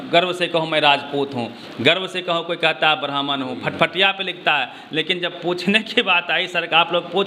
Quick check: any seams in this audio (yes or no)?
no